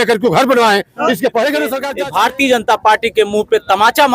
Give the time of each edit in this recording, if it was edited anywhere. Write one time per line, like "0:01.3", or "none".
0:01.8